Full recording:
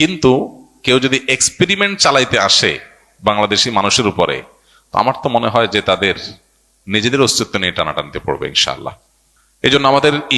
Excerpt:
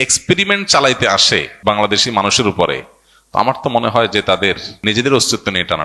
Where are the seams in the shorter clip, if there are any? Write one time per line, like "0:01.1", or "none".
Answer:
0:01.5
0:04.7